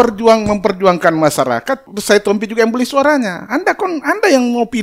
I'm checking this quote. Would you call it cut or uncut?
cut